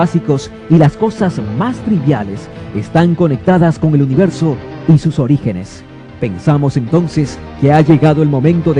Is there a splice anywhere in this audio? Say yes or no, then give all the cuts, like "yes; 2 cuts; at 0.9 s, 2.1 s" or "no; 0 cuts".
yes; 1 cut; at 5.1 s